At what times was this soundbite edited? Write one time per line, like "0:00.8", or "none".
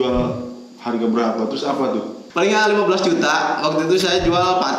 0:02.2